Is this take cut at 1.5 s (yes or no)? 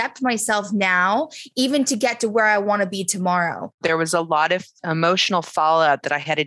no